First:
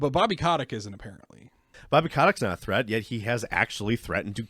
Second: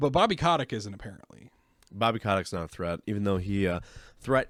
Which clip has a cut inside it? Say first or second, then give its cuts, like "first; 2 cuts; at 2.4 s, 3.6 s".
first; 1 cut; at 1.7 s